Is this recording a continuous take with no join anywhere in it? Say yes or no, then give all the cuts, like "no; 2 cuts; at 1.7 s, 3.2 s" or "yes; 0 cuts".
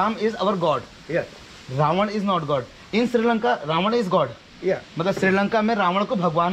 yes; 0 cuts